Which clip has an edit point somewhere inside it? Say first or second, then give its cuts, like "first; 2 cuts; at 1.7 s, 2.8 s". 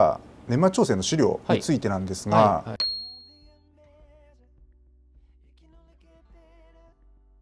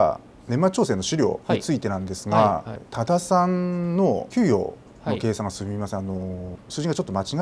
second; 1 cut; at 2.8 s